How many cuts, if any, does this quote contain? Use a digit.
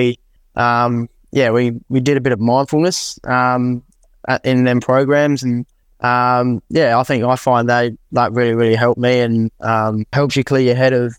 1